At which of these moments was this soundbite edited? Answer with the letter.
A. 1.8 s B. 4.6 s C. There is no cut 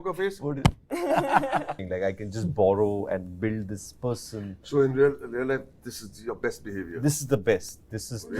A